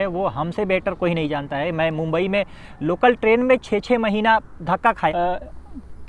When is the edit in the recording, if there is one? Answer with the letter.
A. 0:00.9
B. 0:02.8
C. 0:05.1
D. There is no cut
C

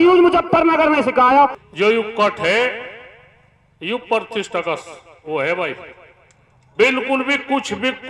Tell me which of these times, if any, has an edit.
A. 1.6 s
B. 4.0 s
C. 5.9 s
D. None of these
A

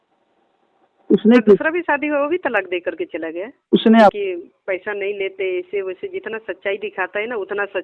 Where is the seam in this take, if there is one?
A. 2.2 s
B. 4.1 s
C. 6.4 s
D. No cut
B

